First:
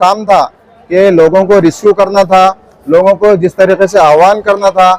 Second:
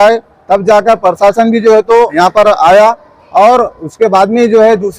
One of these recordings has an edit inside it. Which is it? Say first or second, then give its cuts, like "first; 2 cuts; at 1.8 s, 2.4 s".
second; 1 cut; at 2.1 s